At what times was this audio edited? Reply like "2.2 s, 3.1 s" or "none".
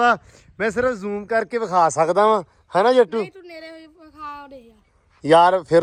none